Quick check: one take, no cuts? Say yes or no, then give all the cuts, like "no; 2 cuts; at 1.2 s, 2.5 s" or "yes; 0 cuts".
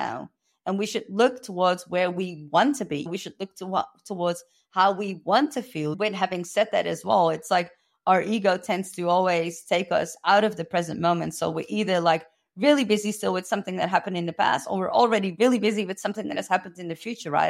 no; 2 cuts; at 3.1 s, 5.9 s